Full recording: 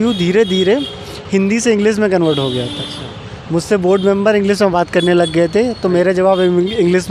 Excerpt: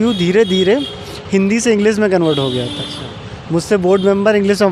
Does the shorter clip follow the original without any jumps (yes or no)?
yes